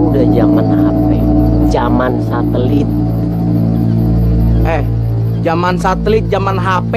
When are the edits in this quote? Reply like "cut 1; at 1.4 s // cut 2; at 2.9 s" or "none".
none